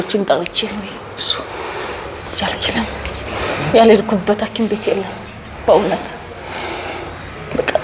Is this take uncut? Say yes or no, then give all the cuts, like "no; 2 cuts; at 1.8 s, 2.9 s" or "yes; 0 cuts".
yes; 0 cuts